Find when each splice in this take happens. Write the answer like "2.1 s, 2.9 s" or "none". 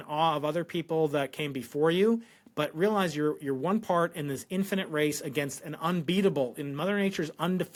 none